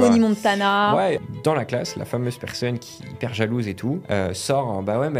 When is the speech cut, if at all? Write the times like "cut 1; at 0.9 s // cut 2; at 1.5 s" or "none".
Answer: cut 1; at 1.2 s // cut 2; at 4.0 s

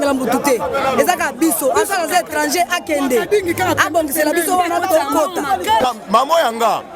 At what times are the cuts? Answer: cut 1; at 5.8 s

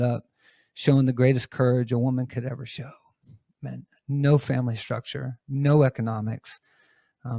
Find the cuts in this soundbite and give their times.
none

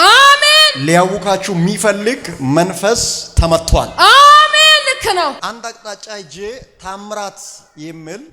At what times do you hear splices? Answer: cut 1; at 5.4 s

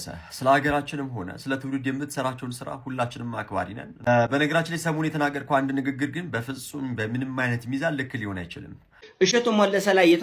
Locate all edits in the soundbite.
cut 1; at 4.1 s // cut 2; at 9.0 s

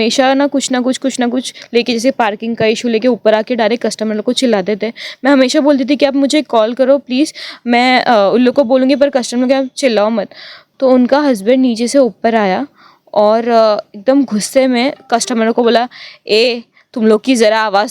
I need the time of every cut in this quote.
cut 1; at 10.6 s

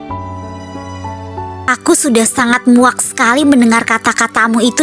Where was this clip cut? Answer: cut 1; at 1.7 s

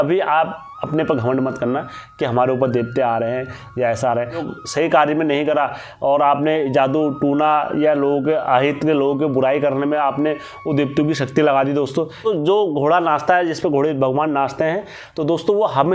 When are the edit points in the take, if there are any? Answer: cut 1; at 4.5 s // cut 2; at 12.3 s

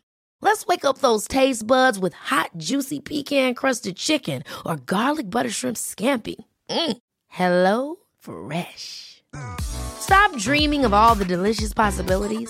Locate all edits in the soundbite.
none

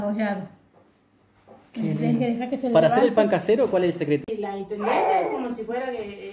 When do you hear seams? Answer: cut 1; at 4.2 s

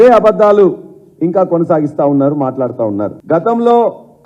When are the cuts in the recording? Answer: cut 1; at 3.2 s

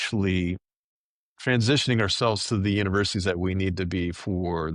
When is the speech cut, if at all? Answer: none

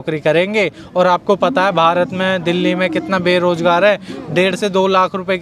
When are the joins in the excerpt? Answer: none

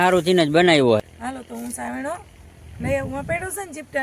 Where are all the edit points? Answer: cut 1; at 1.0 s

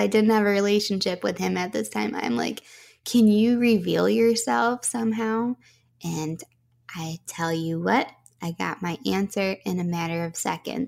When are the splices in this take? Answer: none

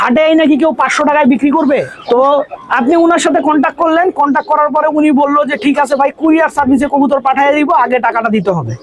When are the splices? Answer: cut 1; at 1.9 s

